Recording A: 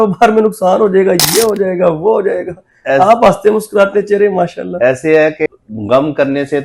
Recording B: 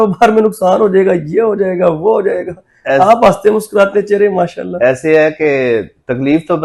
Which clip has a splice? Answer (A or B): A